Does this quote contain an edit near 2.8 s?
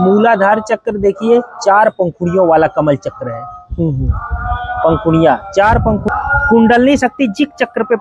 no; 1 cut; at 6.1 s

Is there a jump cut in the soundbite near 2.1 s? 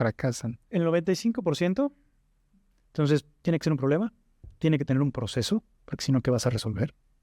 yes; 1 cut; at 2.1 s

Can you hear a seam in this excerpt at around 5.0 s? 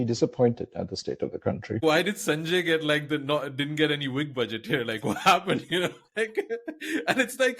no; 1 cut; at 1.8 s

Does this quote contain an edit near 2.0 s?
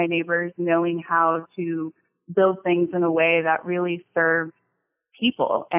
no; 0 cuts

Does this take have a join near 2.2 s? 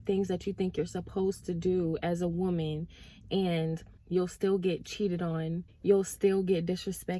no; 2 cuts; at 4.0 s, 5.7 s

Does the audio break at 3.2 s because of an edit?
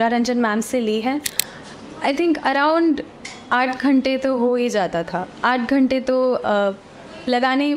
no; 1 cut; at 1.4 s

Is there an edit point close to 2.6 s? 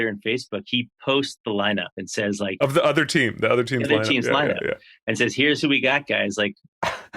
yes; 1 cut; at 2.6 s

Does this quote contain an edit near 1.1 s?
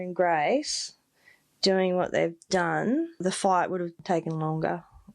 no; 2 cuts; at 3.2 s, 4.0 s

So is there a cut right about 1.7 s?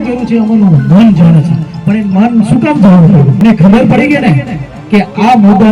no; 1 cut; at 3.4 s

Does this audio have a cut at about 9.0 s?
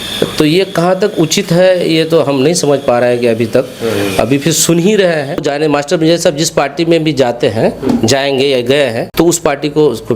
yes; 2 cuts; at 5.5 s, 9.0 s

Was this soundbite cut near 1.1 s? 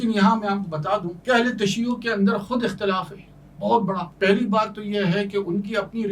yes; 2 cuts; at 1.1 s, 4.1 s

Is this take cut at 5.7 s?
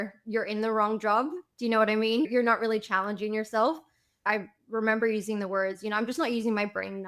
no; 2 cuts; at 2.3 s, 4.2 s

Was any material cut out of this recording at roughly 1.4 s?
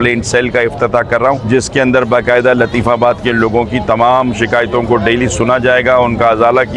yes; 1 cut; at 1.4 s

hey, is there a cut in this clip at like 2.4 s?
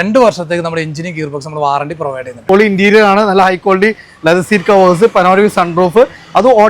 yes; 1 cut; at 2.4 s

